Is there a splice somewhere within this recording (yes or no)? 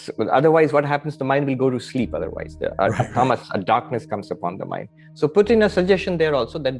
no